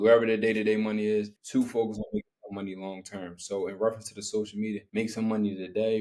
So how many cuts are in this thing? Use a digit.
0